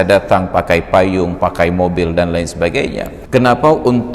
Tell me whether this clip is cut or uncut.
cut